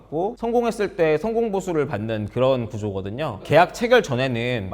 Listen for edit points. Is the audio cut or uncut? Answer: cut